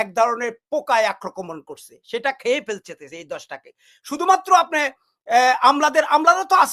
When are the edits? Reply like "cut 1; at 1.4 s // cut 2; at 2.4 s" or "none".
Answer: none